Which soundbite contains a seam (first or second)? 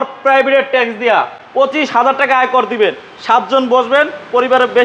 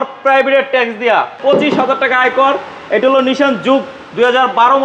second